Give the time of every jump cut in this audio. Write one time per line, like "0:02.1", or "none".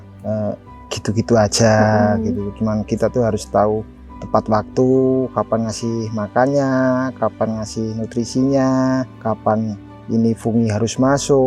none